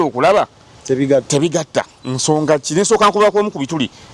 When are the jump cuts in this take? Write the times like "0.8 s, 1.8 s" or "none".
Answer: none